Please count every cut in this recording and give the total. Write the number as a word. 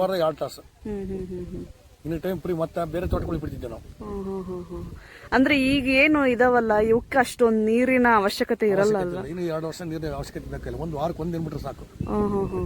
zero